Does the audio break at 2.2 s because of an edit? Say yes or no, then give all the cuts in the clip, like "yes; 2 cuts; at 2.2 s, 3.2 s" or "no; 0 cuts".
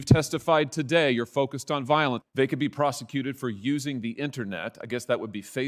yes; 1 cut; at 2.2 s